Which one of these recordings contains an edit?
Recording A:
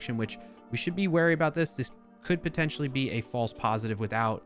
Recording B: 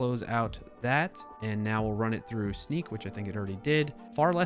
B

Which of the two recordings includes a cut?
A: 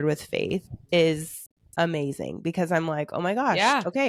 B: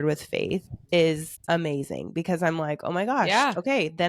B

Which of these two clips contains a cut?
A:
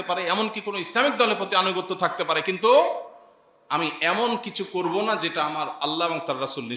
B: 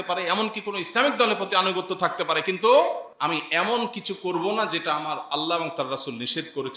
B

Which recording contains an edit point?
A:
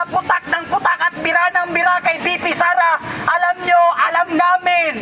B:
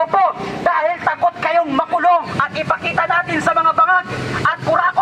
B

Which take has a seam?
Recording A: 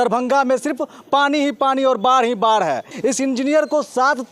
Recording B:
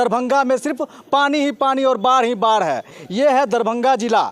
A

